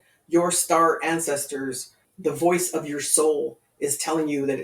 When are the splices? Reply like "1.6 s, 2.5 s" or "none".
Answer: 2.0 s